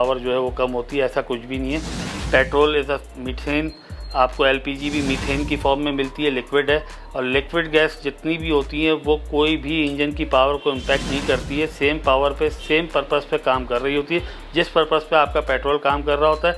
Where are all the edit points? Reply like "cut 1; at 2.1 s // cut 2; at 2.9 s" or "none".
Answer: none